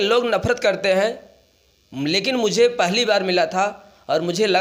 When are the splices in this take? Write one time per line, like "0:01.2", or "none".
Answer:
none